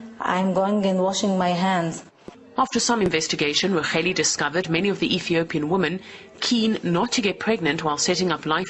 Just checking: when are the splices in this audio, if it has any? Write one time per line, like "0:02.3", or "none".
0:01.2